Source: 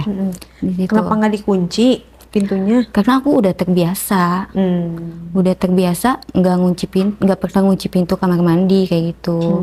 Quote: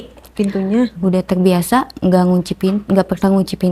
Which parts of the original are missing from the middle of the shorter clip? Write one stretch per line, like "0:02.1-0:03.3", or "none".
0:02.9-0:05.2